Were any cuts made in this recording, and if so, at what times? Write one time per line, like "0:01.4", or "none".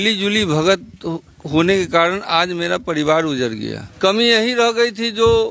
0:03.8

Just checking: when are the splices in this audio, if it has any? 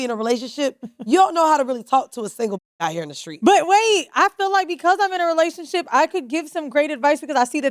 none

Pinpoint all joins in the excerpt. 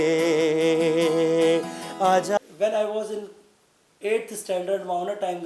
0:02.4

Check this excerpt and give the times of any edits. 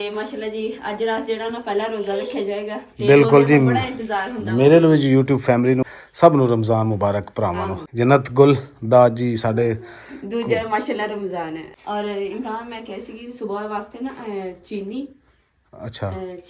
0:05.9
0:07.8
0:11.7

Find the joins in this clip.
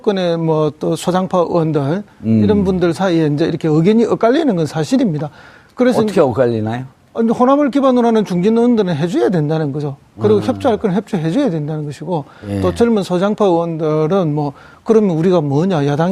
0:10.4

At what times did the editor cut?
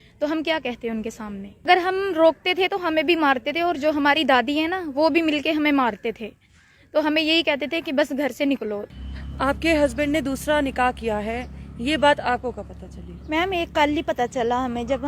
0:01.7
0:08.9

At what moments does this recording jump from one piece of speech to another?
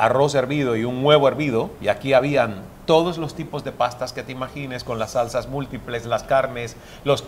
0:01.7

